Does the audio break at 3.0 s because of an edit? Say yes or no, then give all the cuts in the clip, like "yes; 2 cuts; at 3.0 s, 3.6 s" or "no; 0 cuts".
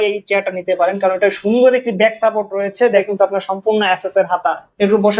yes; 1 cut; at 3.0 s